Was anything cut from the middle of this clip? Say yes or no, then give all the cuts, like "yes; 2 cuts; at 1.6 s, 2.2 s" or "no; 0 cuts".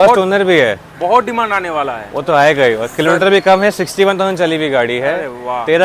no; 0 cuts